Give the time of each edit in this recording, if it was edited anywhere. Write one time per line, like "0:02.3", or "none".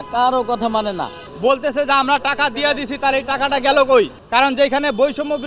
0:01.2
0:04.2